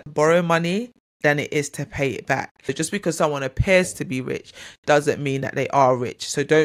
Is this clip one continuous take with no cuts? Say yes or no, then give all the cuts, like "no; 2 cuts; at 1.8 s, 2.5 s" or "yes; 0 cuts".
no; 1 cut; at 2.7 s